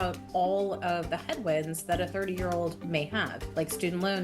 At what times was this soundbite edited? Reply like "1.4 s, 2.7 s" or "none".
none